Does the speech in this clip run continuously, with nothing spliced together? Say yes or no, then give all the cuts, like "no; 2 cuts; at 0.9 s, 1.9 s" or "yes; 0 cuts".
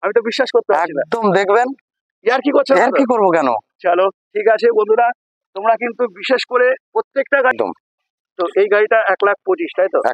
no; 1 cut; at 7.5 s